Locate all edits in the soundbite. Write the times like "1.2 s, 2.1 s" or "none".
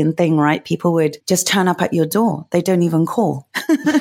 1.2 s